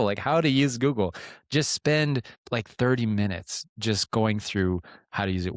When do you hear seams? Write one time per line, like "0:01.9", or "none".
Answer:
0:02.3

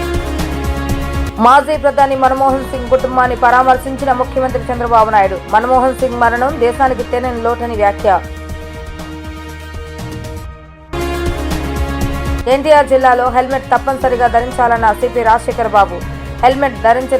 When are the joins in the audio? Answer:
0:01.1

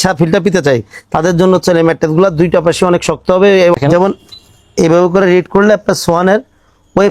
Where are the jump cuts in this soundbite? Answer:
0:03.8

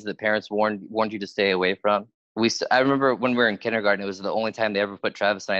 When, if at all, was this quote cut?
0:02.2

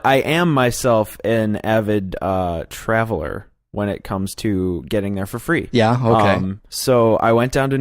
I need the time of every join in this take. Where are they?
0:06.2

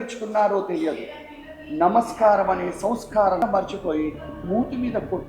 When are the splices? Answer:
0:03.4

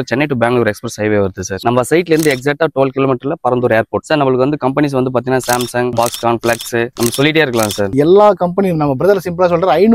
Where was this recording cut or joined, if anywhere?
0:01.5
0:04.0
0:07.9

